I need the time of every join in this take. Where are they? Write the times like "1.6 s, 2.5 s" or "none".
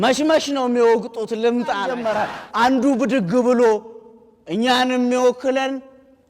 1.9 s